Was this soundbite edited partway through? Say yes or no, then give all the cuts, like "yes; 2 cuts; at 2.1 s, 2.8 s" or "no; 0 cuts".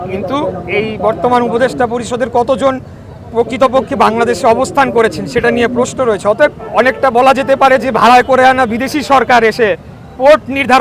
yes; 1 cut; at 6.6 s